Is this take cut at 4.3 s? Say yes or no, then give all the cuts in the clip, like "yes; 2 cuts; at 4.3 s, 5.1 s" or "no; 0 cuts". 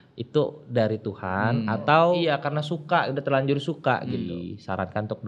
yes; 2 cuts; at 2.2 s, 4.3 s